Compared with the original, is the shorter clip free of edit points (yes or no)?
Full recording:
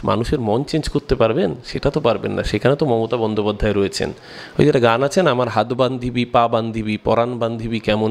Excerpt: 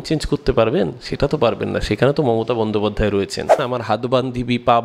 no